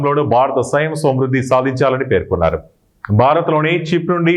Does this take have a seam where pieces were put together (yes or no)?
no